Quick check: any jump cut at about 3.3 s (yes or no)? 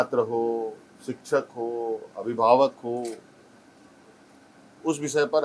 no